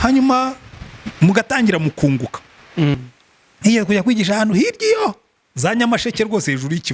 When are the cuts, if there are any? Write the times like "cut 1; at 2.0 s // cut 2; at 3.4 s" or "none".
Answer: cut 1; at 2.9 s